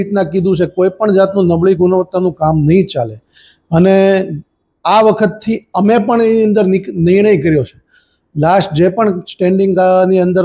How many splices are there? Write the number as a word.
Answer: zero